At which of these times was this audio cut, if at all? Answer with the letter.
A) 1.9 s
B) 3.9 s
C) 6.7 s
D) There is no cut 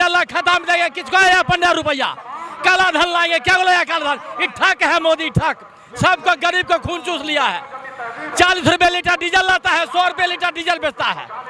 D